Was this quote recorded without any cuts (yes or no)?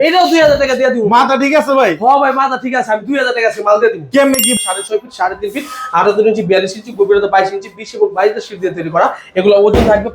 no